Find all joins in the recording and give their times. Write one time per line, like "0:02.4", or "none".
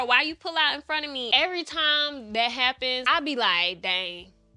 0:01.3
0:03.0